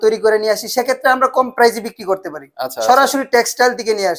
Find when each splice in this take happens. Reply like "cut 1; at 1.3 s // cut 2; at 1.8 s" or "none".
none